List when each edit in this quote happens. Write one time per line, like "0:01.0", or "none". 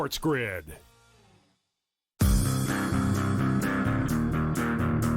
0:00.8
0:02.3